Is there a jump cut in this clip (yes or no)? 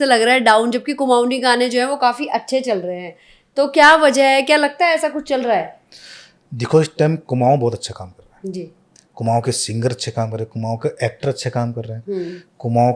no